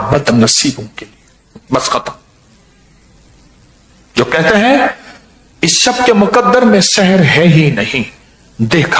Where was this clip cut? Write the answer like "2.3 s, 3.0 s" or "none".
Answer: none